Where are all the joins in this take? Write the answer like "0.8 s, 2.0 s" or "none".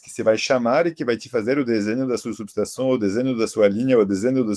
none